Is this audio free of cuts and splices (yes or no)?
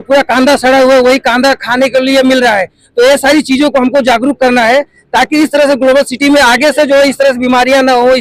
yes